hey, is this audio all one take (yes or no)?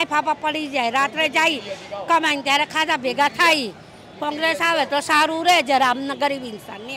yes